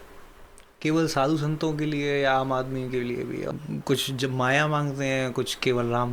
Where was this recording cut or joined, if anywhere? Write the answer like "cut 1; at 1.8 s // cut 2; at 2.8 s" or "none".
cut 1; at 3.5 s